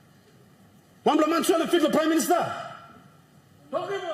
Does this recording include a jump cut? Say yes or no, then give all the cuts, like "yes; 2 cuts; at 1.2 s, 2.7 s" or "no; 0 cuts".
no; 0 cuts